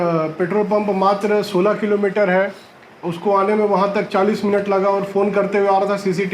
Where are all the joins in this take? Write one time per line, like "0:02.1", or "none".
none